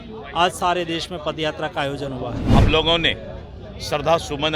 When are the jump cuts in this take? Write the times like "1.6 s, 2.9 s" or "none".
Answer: 2.5 s

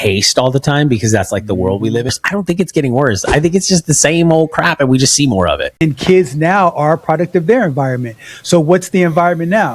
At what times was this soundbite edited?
2.1 s, 5.7 s

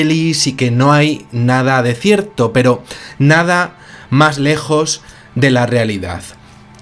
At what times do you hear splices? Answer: 2.3 s

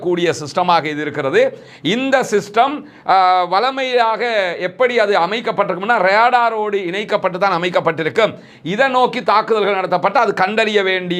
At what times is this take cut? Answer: none

